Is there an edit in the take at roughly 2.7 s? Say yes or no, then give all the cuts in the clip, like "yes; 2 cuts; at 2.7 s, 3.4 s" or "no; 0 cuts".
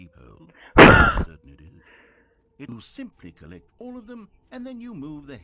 yes; 1 cut; at 2.7 s